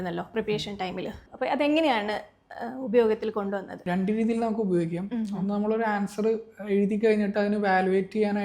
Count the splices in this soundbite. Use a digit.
2